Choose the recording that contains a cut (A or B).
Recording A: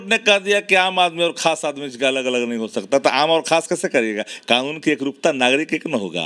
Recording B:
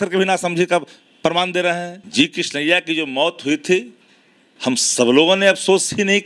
B